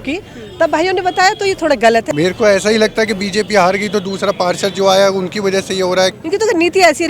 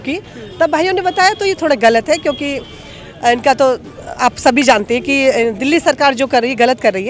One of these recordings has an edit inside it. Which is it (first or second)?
first